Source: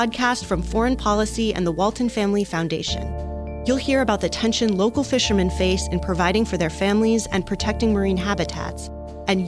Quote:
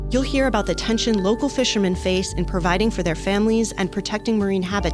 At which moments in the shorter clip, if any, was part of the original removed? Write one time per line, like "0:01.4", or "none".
none